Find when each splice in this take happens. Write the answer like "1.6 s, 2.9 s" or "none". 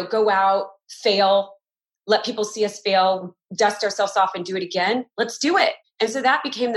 5.8 s

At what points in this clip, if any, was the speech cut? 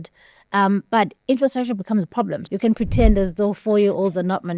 2.4 s

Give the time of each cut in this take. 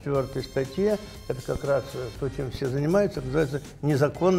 none

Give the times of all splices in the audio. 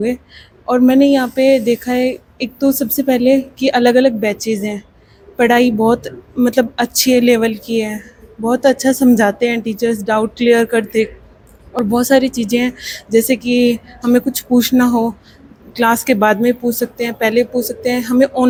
none

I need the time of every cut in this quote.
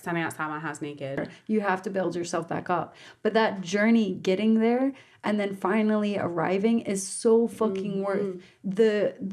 1.3 s

